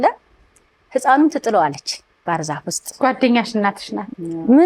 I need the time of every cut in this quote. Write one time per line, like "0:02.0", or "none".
0:02.9